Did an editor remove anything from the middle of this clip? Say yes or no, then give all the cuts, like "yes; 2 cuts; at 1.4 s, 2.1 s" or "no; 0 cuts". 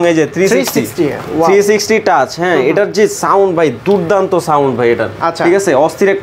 no; 0 cuts